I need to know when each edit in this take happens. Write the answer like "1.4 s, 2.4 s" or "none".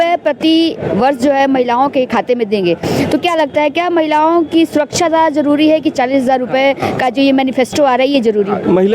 none

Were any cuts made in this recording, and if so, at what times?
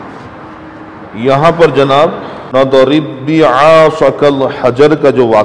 2.3 s

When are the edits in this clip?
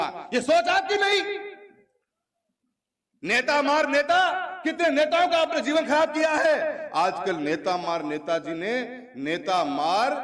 none

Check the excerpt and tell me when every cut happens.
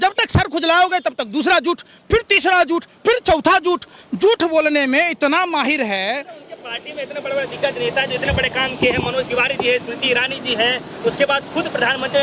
none

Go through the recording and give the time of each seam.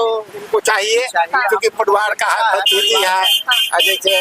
none

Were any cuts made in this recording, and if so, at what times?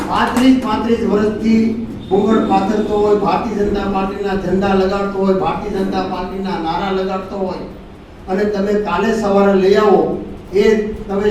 none

